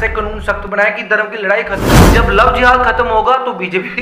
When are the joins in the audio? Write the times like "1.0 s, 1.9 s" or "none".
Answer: 2.0 s